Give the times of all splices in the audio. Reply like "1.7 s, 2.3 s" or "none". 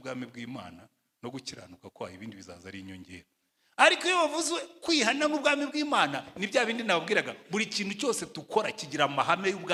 none